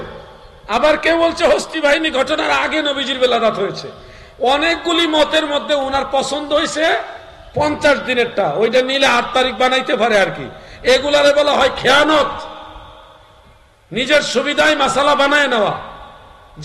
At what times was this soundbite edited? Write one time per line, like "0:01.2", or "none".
none